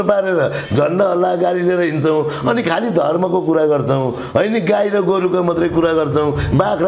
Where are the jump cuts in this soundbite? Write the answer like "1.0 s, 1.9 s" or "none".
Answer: none